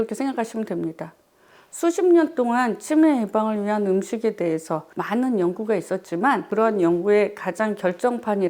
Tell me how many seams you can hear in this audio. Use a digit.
2